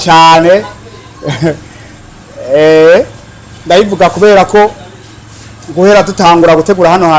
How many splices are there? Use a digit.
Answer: 0